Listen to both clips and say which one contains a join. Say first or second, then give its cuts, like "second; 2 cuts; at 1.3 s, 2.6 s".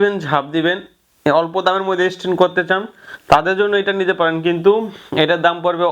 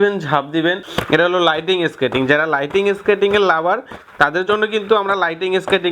second; 1 cut; at 0.9 s